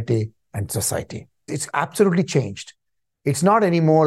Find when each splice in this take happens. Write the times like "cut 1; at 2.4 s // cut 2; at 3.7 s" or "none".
cut 1; at 1.5 s